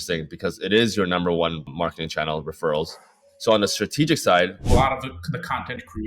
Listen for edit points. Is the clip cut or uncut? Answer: cut